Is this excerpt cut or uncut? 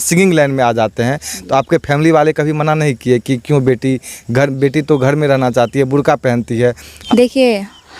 cut